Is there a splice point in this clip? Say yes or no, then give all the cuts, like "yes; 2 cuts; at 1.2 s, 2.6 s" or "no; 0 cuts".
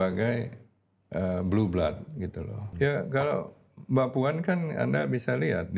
yes; 1 cut; at 2.6 s